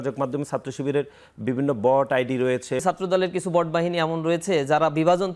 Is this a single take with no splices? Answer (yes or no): no